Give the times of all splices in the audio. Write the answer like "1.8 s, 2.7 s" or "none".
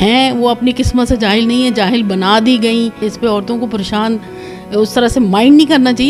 3.0 s